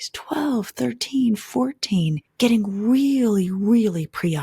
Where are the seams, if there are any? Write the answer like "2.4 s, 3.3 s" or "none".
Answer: 2.2 s